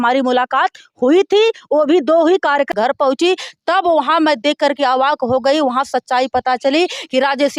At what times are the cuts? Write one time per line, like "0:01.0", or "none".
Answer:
0:02.7